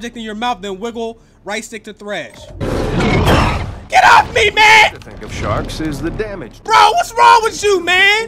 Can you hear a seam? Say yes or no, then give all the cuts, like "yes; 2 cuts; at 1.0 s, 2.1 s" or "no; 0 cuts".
yes; 1 cut; at 2.7 s